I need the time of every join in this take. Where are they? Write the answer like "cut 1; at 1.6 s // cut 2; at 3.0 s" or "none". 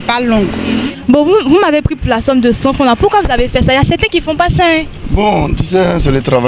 cut 1; at 0.9 s